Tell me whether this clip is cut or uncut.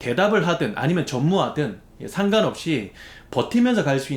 uncut